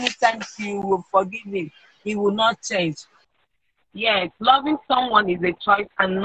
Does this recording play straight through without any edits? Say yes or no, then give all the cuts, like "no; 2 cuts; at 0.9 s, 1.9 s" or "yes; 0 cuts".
no; 1 cut; at 3.1 s